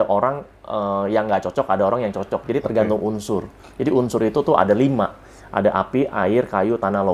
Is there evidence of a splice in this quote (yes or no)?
no